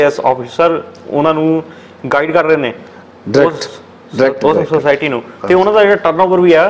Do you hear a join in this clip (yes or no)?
no